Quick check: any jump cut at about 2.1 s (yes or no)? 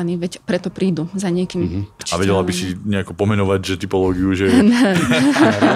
yes